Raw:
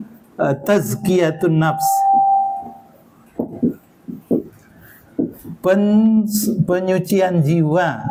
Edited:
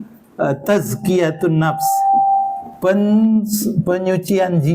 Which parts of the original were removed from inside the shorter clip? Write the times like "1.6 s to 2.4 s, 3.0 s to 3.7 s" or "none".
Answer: 2.7 s to 5.5 s